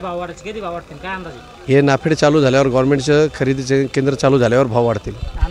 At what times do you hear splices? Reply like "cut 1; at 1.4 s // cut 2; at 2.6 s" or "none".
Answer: none